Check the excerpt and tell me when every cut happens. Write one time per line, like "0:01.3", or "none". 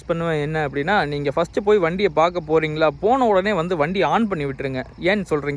none

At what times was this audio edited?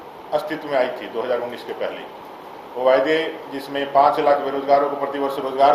none

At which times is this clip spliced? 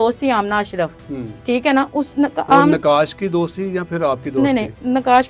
none

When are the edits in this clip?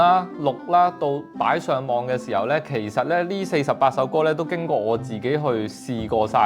none

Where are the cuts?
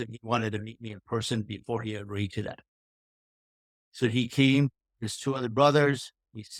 none

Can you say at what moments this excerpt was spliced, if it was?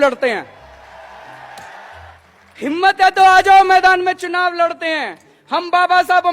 0:02.1

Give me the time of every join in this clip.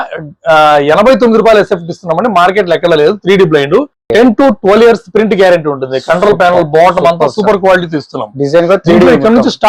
none

